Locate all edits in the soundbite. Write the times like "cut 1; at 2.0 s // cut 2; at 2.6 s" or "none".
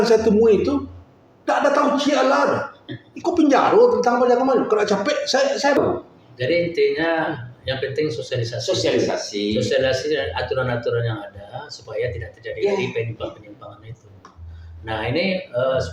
cut 1; at 5.8 s